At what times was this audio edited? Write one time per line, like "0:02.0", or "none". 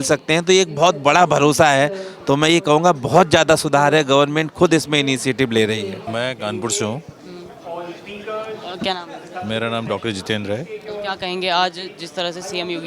none